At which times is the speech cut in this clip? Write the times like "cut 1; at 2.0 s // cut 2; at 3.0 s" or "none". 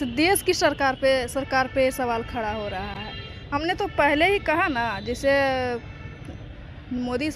none